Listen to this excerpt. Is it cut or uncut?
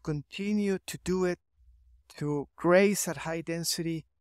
uncut